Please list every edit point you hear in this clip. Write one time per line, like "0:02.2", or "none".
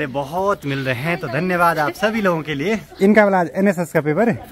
none